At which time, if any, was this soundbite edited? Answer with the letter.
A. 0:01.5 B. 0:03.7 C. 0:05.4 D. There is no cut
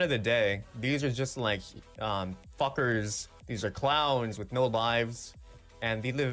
D